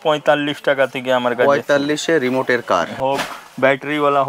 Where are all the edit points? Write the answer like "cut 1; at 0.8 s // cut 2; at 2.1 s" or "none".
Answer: cut 1; at 3.0 s